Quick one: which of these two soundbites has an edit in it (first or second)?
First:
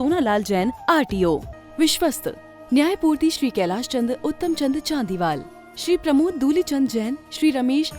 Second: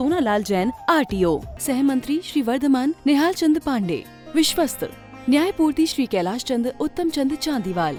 first